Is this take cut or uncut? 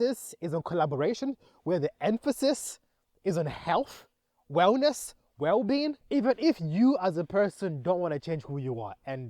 cut